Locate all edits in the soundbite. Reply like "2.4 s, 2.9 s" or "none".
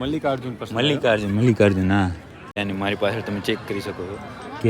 2.6 s